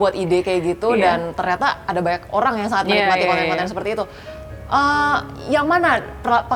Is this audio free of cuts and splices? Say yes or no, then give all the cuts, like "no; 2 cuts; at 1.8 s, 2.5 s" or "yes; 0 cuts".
yes; 0 cuts